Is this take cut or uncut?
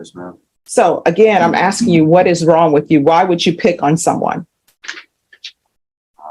uncut